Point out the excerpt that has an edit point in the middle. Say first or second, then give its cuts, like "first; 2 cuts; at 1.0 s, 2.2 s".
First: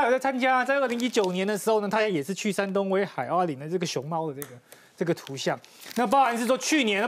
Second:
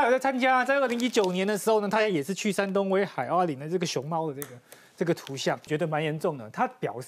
second; 1 cut; at 5.7 s